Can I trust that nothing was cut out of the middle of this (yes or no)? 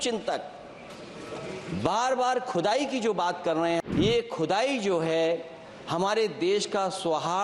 no